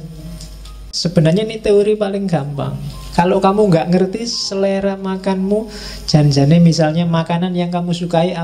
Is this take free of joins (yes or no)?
no